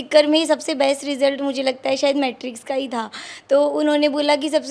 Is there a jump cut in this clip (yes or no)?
no